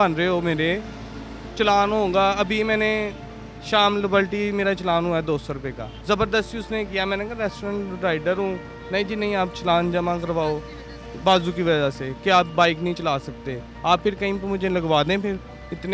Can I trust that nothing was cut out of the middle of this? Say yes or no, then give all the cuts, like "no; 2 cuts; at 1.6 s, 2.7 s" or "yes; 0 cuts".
yes; 0 cuts